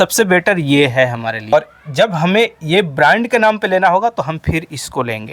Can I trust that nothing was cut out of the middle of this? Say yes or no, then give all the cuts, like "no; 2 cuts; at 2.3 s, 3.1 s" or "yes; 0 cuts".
no; 1 cut; at 1.5 s